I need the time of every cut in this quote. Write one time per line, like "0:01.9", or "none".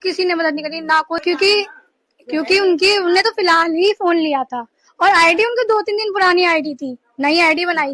0:01.2